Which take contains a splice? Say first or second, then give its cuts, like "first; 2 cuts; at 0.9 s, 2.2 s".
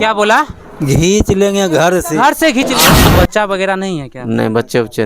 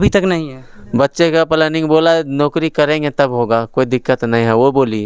first; 1 cut; at 3.0 s